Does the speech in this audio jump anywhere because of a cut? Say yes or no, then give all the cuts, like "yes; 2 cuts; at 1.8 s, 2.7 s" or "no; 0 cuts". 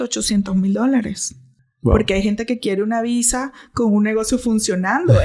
no; 0 cuts